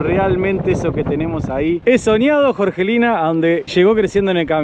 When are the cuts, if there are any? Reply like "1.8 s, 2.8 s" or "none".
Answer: 3.7 s